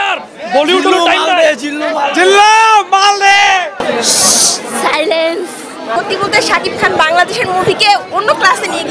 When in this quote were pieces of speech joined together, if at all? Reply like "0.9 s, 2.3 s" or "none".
3.8 s, 6.0 s

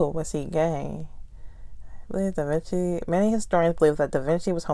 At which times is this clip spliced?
none

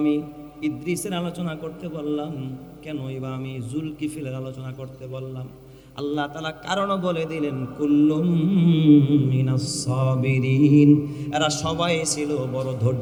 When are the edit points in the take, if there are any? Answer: none

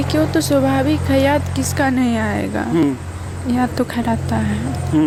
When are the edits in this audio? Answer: none

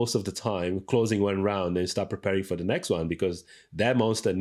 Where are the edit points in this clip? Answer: none

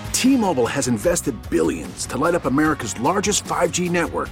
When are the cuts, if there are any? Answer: none

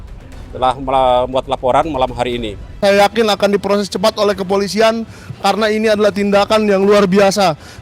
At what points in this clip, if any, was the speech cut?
2.8 s

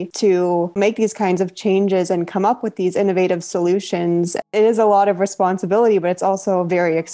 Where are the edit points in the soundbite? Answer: 4.4 s

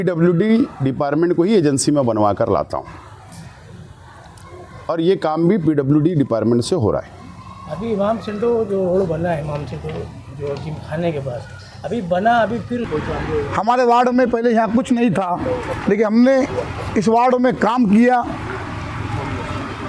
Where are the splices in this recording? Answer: 12.9 s

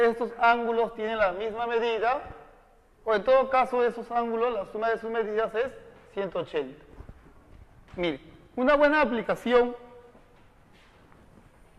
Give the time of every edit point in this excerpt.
2.4 s

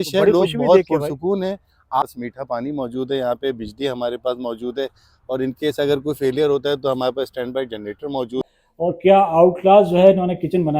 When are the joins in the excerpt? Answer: 2.0 s, 8.4 s

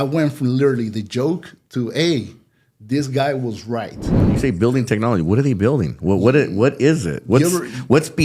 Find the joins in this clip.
4.2 s

